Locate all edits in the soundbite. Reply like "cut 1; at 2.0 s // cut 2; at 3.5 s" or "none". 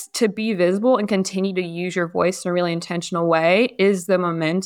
none